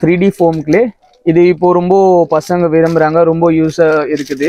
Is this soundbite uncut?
yes; 0 cuts

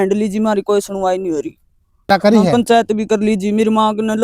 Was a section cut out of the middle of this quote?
yes; 1 cut; at 2.1 s

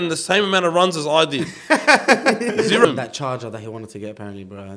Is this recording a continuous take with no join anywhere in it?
no; 1 cut; at 2.9 s

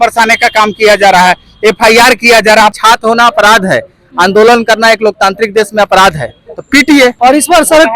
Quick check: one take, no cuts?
no; 2 cuts; at 2.8 s, 7.2 s

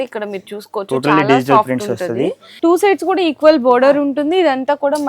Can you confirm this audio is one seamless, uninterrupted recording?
no; 1 cut; at 2.4 s

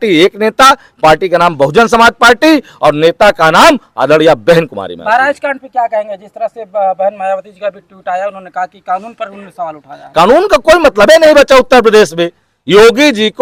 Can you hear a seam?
no; 0 cuts

